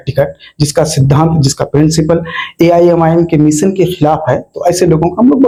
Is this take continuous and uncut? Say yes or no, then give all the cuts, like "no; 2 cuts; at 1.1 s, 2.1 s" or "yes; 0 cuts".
yes; 0 cuts